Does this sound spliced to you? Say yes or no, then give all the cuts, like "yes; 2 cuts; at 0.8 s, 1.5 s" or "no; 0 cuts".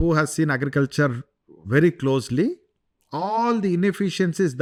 no; 0 cuts